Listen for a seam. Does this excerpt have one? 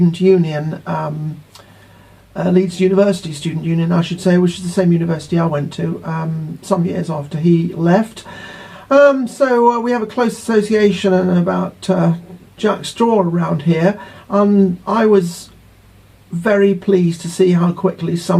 yes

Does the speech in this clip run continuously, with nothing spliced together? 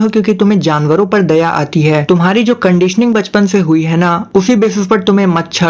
no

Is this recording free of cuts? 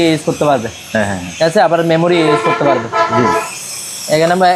yes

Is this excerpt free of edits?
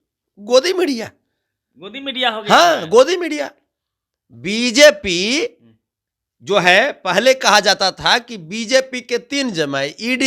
yes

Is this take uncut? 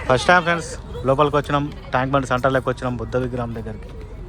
yes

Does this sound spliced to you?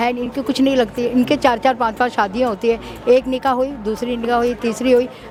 no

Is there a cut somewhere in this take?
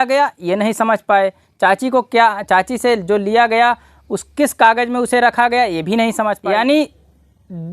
yes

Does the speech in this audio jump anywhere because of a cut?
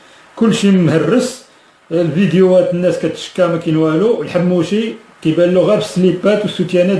yes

